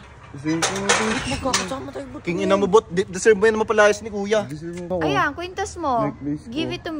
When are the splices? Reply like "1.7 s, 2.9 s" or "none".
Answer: 4.9 s

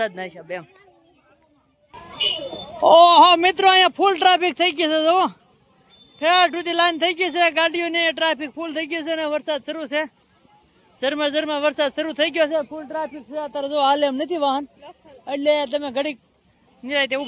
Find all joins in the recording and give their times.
none

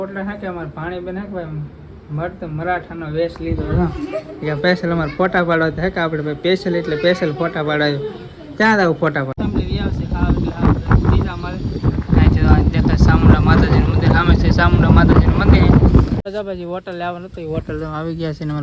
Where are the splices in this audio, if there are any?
9.3 s, 16.1 s

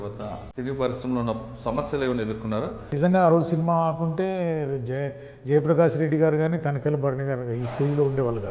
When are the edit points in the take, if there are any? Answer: 2.9 s

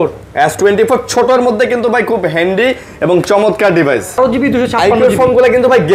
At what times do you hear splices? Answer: 4.2 s

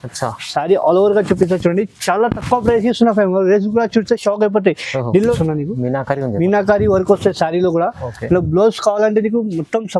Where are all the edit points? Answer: 5.3 s

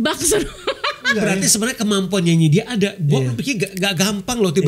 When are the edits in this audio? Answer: 1.2 s

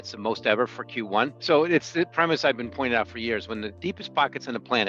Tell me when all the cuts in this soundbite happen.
1.4 s, 3.7 s

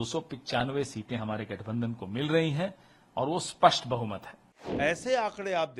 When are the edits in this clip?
4.6 s

